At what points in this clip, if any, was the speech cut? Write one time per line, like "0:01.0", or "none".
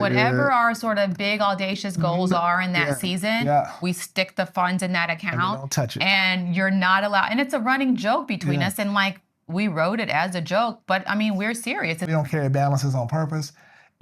0:12.1